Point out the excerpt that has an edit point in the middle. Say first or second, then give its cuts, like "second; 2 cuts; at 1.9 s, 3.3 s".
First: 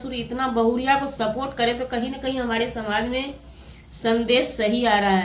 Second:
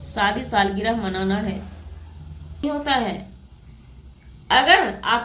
second; 1 cut; at 2.6 s